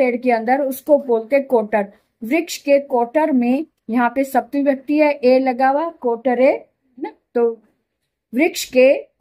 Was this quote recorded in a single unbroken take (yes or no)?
yes